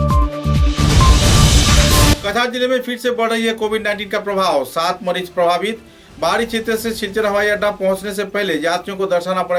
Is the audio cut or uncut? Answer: uncut